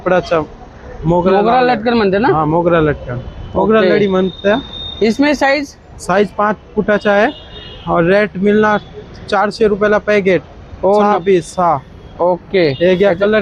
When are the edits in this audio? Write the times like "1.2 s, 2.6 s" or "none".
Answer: none